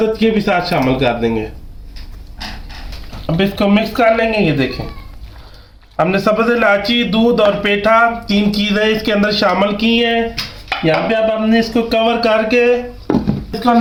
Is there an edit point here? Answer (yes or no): no